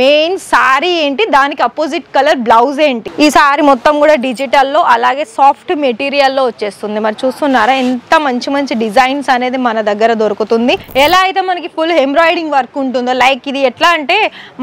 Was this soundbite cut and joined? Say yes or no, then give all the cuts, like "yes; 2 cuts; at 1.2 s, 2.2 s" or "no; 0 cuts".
yes; 2 cuts; at 3.1 s, 10.8 s